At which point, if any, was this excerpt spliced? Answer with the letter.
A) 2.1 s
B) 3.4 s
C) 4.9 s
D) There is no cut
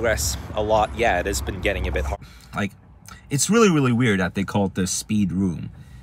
A